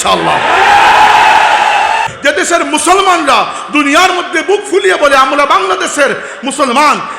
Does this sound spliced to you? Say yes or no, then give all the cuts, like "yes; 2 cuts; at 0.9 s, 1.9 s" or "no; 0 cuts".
yes; 1 cut; at 2.0 s